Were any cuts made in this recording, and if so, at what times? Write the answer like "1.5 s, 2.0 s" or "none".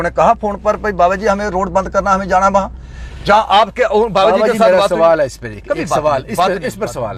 none